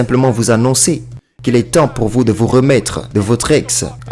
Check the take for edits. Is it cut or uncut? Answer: uncut